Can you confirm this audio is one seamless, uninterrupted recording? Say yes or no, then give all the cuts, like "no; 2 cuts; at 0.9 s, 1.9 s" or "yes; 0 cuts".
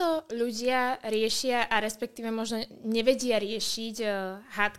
yes; 0 cuts